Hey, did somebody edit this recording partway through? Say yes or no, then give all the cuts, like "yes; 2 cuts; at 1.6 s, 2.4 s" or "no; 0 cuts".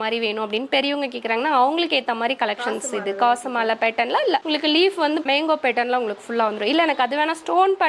no; 0 cuts